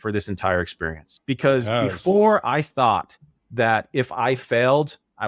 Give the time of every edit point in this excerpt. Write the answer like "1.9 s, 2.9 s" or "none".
1.1 s